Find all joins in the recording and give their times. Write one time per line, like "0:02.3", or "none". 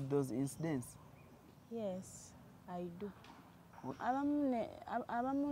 0:03.9

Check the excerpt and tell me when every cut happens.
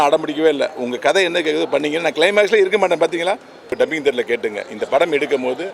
0:03.8

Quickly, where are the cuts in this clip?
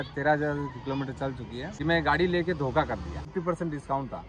0:01.6
0:03.3

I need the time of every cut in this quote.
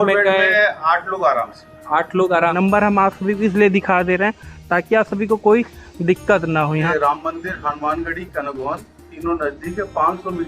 0:02.5
0:06.9

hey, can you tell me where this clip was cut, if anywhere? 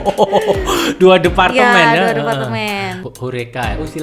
0:03.0

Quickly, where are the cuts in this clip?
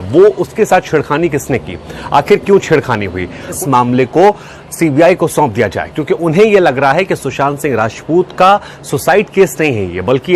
0:03.5

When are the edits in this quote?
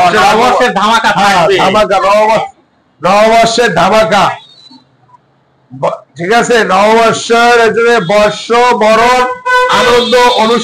none

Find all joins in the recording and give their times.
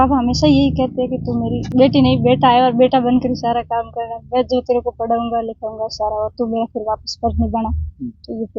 0:01.6

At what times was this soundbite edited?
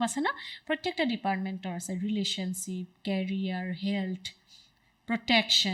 none

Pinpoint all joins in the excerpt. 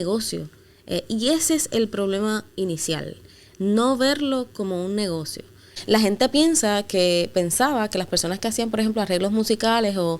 0:05.6

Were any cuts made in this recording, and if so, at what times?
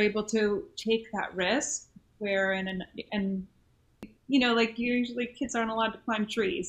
0:04.1

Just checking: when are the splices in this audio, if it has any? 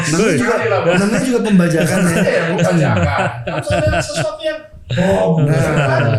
none

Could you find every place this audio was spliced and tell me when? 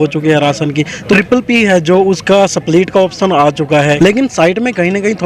0:01.2
0:04.0

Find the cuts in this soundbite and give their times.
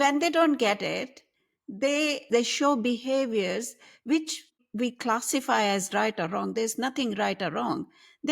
0:02.2
0:04.6

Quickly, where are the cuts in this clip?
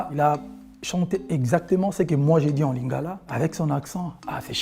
none

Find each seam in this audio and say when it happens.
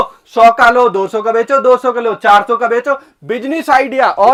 none

